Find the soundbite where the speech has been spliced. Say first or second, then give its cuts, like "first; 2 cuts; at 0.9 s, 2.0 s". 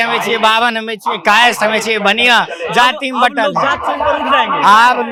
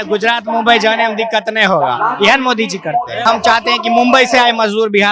second; 1 cut; at 3.2 s